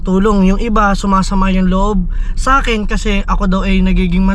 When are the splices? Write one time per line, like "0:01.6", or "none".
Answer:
none